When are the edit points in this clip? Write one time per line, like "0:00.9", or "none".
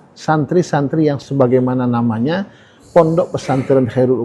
0:01.2